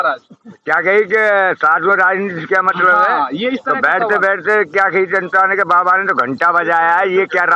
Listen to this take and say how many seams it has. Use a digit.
0